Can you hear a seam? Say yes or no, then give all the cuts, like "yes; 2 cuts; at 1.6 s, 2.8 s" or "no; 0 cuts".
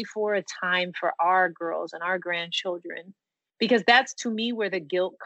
no; 0 cuts